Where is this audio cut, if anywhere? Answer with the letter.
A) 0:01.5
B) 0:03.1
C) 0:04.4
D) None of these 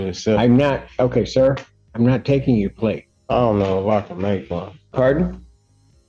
B